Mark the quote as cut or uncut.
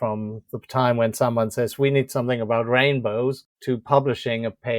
cut